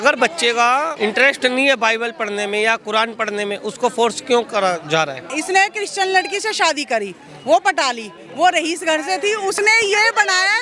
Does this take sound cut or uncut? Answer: cut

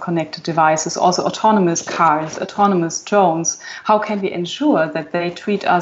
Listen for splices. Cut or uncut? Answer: uncut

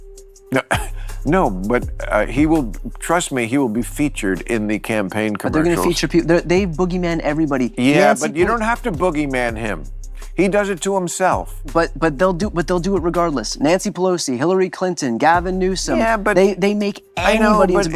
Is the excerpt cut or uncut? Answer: uncut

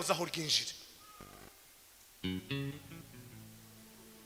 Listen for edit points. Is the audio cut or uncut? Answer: uncut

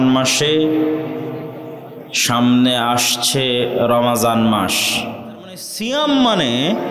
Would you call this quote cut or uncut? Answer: cut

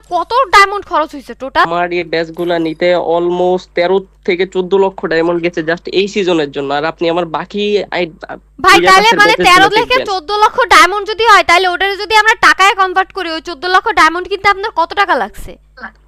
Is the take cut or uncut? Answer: cut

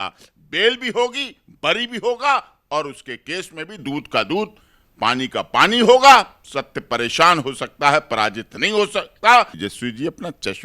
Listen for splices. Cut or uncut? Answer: cut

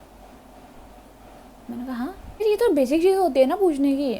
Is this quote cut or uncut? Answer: cut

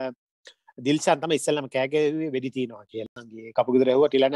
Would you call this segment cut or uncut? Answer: cut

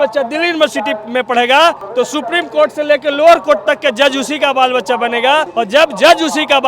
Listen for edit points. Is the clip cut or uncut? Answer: cut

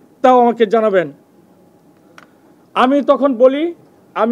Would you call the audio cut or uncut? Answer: uncut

